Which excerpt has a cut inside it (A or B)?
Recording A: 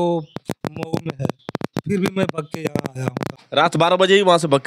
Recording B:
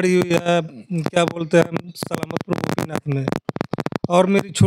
A